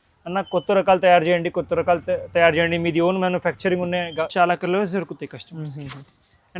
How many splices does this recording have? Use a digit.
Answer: 1